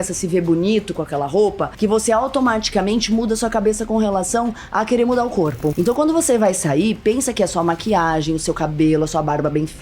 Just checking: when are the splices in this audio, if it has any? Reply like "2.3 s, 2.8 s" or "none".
1.7 s, 5.8 s